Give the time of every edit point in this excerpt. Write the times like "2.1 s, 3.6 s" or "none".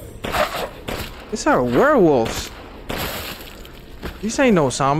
none

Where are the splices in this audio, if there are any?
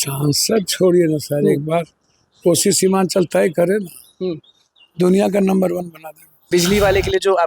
6.5 s

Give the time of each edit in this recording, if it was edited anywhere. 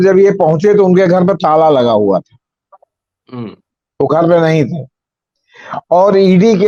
none

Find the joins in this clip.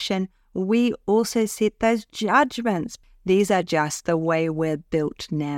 2.9 s

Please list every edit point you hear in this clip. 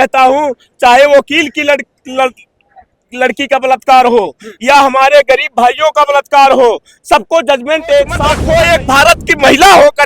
8.3 s

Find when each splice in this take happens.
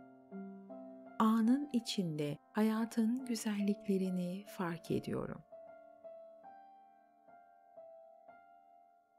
1.2 s, 5.6 s

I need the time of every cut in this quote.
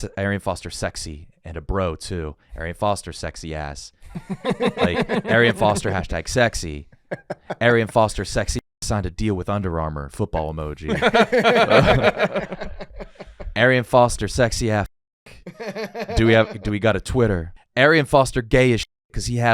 17.6 s

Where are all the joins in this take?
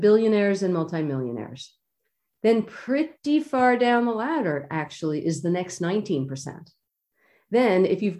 3.2 s

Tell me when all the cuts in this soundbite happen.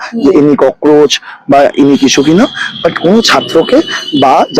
none

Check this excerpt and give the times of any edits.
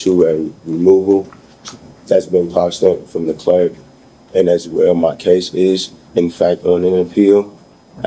none

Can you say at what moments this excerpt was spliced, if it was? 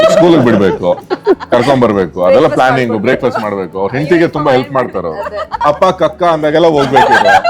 5.5 s

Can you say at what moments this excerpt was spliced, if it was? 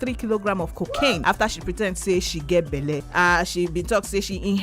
1.2 s, 3.1 s

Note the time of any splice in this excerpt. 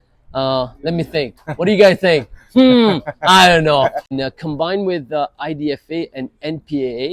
4.1 s

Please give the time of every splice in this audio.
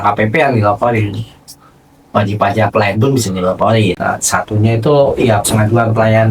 4.0 s

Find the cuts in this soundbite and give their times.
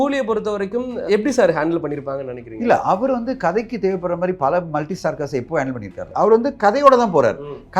1.1 s, 6.1 s

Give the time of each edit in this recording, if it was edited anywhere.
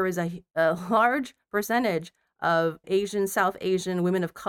2.8 s

